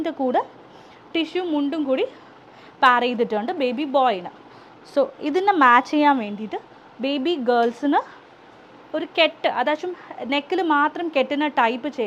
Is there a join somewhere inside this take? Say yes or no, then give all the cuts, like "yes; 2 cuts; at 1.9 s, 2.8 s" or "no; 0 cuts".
no; 0 cuts